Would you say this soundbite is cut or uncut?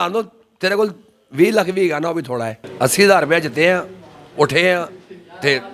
cut